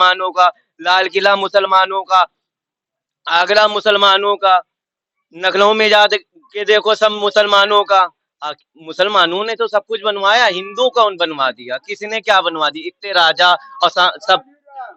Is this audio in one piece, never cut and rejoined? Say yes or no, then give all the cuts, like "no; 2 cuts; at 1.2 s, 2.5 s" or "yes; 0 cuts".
yes; 0 cuts